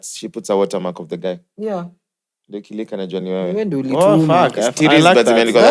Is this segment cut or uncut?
uncut